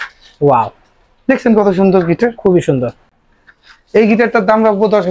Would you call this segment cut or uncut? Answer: uncut